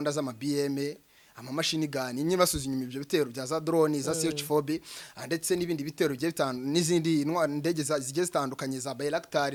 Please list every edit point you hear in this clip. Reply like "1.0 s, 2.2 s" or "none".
none